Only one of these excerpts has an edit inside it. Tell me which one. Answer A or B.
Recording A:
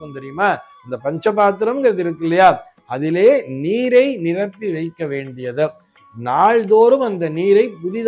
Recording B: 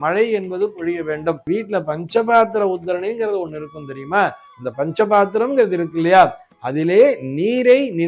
B